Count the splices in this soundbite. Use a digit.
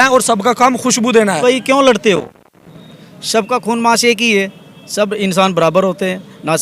1